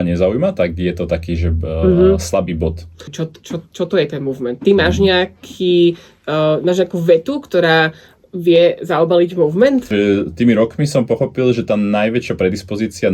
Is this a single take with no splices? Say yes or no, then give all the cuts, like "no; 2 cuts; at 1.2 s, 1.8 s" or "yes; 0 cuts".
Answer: no; 2 cuts; at 3.1 s, 9.9 s